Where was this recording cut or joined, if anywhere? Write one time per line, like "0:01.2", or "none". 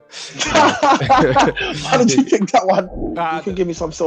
0:03.0